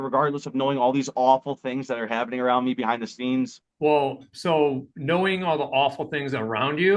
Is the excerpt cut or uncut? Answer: uncut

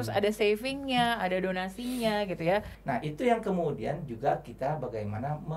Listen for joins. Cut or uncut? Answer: cut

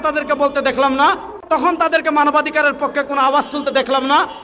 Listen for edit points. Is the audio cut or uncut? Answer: cut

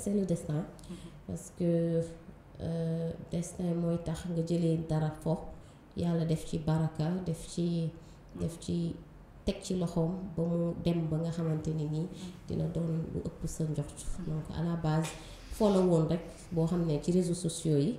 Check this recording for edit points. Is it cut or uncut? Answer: uncut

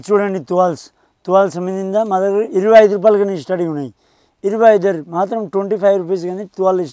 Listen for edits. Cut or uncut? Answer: uncut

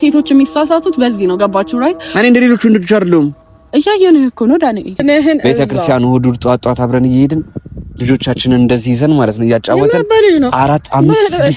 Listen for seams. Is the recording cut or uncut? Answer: cut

